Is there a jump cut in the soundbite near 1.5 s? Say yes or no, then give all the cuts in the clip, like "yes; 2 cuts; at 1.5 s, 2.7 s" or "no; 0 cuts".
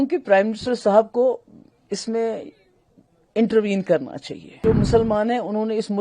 no; 1 cut; at 4.6 s